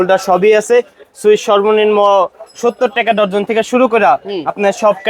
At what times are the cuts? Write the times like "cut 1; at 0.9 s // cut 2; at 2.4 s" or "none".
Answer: none